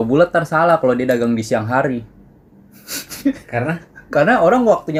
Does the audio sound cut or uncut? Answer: uncut